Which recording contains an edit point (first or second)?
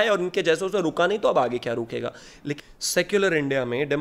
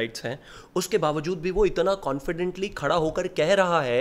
first